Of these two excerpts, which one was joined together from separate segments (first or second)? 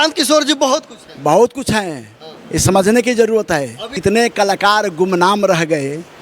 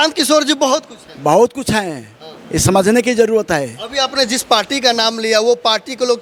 first